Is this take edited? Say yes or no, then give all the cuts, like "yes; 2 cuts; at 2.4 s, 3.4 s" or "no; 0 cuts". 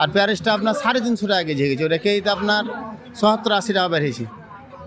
no; 0 cuts